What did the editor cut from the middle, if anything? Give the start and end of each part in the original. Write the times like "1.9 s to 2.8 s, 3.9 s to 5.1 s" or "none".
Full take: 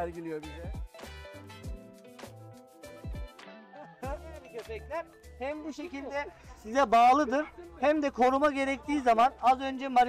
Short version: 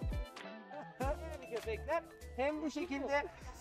none